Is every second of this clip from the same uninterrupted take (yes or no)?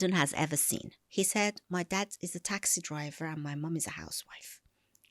no